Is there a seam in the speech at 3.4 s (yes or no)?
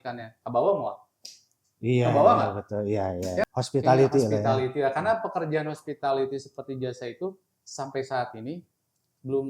yes